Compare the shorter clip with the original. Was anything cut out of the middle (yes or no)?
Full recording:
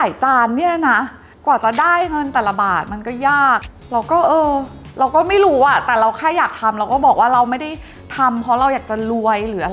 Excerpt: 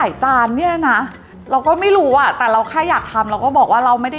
yes